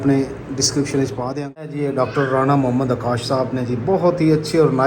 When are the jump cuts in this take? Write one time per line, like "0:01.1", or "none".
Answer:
0:01.7

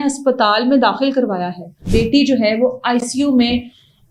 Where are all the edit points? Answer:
0:01.8

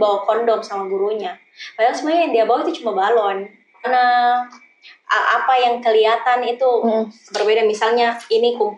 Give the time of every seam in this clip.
0:03.9

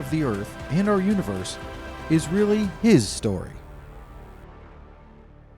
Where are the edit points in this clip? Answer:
0:03.5

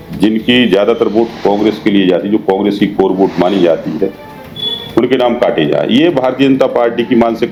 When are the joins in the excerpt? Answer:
none

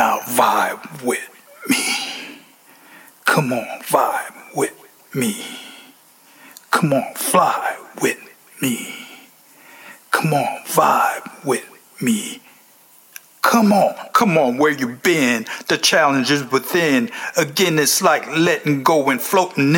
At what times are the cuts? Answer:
0:14.0

